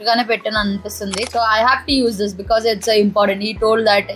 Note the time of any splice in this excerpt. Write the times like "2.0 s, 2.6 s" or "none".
1.3 s